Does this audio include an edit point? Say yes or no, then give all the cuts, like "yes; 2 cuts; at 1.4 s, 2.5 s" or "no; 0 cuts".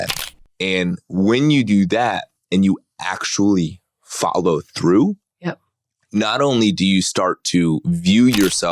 no; 0 cuts